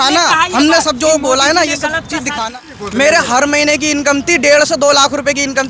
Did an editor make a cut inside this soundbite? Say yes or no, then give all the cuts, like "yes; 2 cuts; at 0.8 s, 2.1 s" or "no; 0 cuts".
yes; 1 cut; at 2.5 s